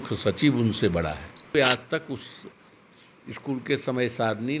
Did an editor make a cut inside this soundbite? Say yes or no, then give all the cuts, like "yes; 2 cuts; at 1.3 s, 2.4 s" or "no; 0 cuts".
yes; 1 cut; at 1.5 s